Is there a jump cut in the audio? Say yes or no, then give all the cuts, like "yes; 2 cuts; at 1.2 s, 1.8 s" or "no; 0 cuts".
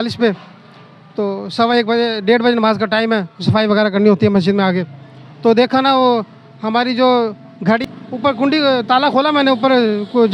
yes; 1 cut; at 7.8 s